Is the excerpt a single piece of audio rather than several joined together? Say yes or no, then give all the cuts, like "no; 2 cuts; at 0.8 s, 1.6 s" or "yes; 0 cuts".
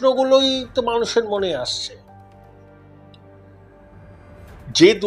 yes; 0 cuts